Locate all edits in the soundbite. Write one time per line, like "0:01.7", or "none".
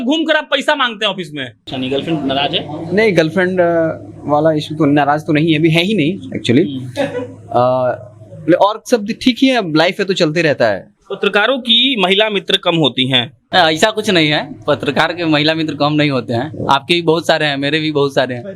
0:01.6
0:13.4